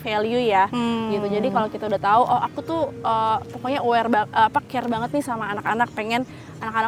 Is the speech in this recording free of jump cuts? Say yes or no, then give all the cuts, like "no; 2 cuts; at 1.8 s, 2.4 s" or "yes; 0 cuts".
yes; 0 cuts